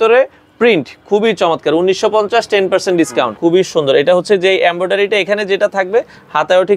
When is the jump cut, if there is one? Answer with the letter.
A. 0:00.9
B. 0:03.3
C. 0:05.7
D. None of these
B